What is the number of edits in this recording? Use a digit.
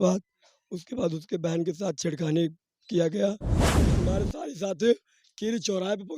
1